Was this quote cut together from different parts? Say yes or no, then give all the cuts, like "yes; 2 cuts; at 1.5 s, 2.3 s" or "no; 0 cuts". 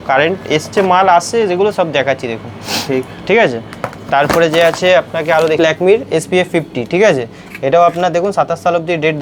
yes; 1 cut; at 5.6 s